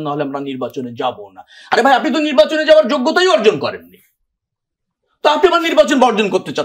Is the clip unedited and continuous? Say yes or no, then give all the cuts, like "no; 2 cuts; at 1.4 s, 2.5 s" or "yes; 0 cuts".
yes; 0 cuts